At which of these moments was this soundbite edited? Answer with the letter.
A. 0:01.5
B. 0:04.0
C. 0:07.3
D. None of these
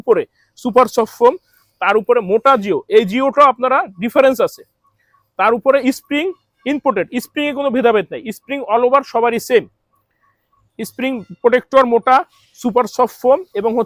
D